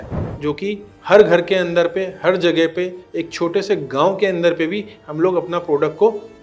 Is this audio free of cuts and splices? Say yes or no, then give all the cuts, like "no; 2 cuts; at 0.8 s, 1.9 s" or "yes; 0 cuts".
yes; 0 cuts